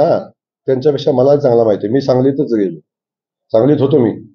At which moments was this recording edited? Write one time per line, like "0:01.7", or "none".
none